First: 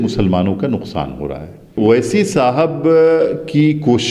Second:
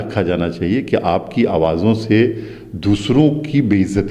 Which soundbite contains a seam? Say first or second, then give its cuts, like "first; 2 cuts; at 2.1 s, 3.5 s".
first; 1 cut; at 1.8 s